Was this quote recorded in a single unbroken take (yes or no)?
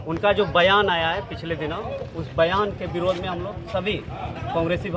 yes